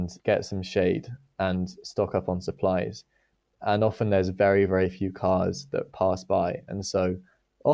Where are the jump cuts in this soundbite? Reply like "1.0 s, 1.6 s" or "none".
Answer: none